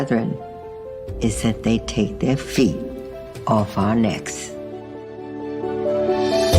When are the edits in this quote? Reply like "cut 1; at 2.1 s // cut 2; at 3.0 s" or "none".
cut 1; at 4.2 s